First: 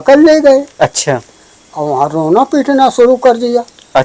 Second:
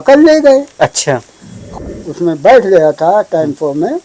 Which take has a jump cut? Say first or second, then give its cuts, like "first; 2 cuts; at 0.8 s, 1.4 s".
second; 1 cut; at 1.7 s